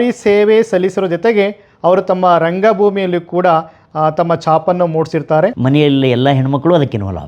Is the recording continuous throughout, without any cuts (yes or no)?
no